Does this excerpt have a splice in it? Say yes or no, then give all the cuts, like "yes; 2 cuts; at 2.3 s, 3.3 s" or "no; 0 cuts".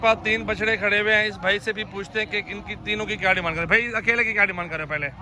no; 0 cuts